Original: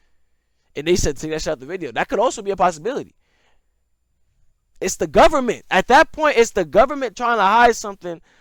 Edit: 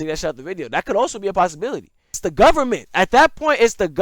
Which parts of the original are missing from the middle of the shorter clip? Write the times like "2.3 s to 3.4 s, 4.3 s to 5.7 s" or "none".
3.4 s to 4.9 s